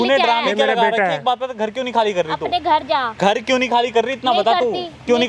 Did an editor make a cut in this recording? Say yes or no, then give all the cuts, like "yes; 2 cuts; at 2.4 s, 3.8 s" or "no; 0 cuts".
no; 0 cuts